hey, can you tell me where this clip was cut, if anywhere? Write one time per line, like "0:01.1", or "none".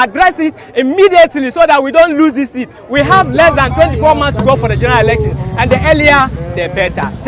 none